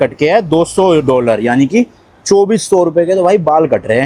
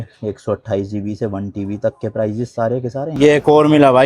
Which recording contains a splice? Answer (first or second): second